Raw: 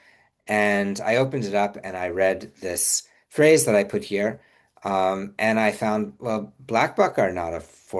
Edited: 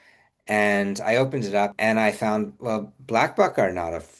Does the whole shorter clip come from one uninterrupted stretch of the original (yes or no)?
no